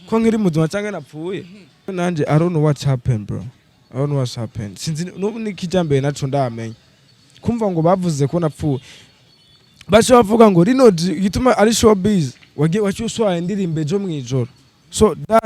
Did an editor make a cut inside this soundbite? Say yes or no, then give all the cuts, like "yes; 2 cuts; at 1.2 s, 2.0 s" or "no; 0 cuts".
yes; 1 cut; at 1.9 s